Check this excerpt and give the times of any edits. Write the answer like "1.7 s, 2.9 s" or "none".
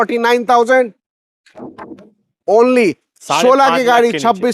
none